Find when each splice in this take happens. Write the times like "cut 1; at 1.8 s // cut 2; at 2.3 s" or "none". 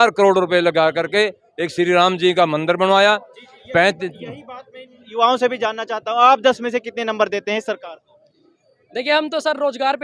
none